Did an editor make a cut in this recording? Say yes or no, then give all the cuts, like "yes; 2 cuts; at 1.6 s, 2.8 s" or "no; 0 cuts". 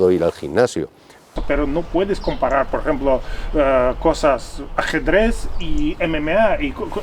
yes; 1 cut; at 1.4 s